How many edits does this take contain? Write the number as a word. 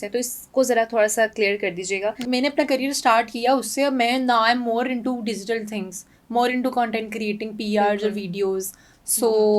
one